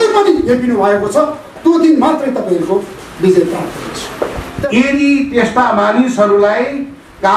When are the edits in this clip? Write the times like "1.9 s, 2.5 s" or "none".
4.5 s